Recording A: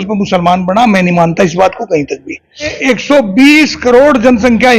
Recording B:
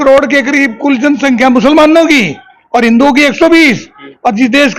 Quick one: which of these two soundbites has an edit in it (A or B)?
A